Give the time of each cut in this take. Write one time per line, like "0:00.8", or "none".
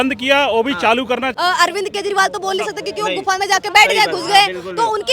0:01.3

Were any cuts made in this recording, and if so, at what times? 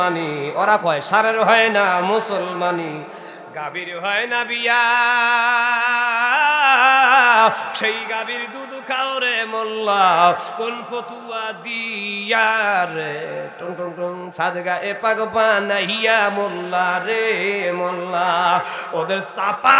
none

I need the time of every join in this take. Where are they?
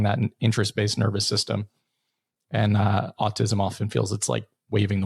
none

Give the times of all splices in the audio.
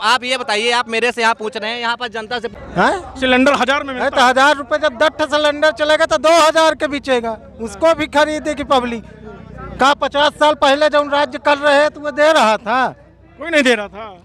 0:02.5

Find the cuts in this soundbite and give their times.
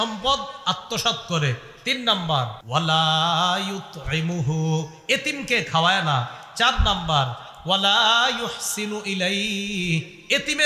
0:02.6

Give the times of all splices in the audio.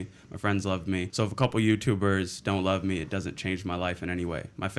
0:01.1

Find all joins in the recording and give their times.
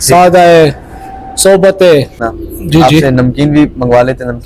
0:02.2

